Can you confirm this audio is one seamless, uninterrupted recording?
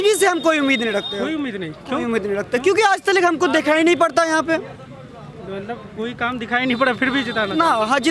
yes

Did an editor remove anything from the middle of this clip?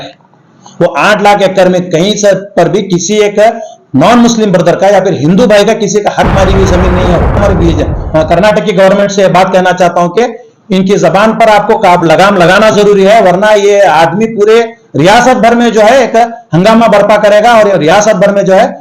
yes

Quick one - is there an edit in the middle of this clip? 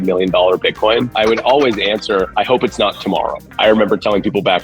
yes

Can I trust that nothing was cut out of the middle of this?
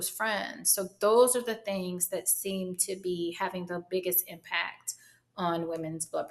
yes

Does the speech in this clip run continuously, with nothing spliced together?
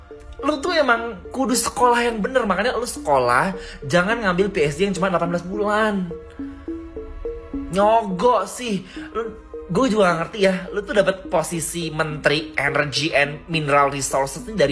yes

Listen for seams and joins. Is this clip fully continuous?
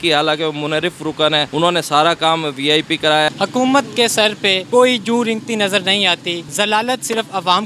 no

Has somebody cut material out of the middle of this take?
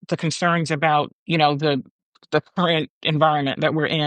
yes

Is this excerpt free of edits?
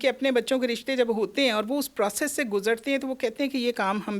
yes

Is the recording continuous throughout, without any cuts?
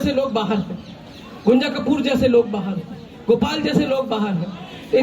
yes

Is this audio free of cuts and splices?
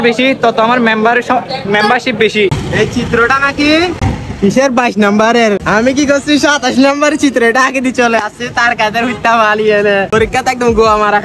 no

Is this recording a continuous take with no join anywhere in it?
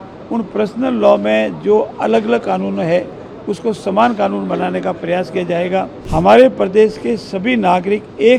no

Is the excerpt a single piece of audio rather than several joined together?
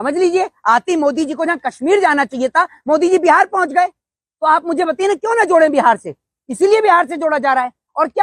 yes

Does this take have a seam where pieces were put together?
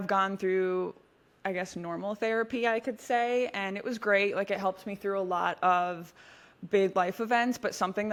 no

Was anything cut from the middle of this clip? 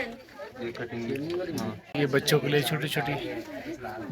yes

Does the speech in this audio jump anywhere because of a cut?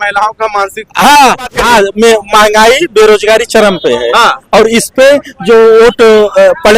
yes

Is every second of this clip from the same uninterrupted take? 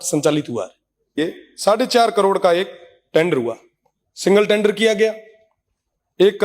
no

